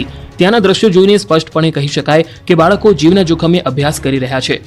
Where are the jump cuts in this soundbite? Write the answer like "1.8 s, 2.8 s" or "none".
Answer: none

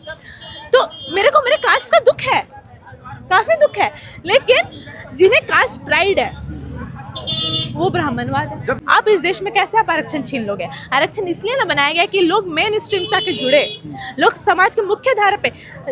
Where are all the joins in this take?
8.8 s

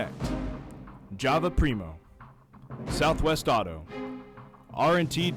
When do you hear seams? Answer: none

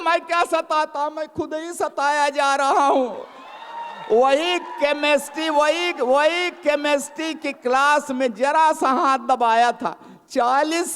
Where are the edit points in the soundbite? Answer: 0.9 s

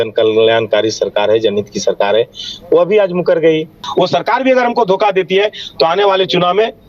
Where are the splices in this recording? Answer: 3.8 s

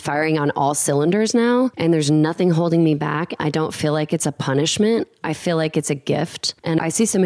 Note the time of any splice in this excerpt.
none

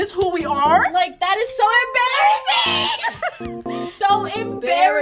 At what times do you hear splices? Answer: 3.9 s

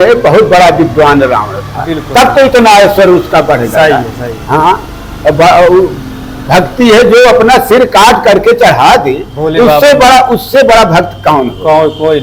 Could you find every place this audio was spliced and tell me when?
none

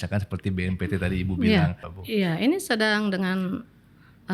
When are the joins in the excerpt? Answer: 1.9 s

